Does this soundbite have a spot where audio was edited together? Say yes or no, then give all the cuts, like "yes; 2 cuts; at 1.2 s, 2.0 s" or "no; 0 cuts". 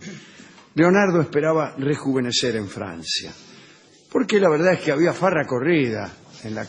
no; 0 cuts